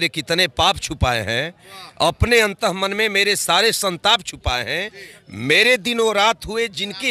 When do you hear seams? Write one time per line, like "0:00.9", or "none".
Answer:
none